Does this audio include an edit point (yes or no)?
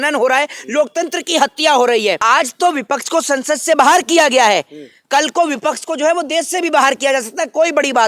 yes